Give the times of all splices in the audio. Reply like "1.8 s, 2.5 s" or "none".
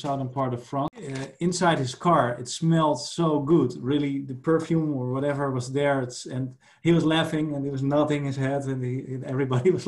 0.9 s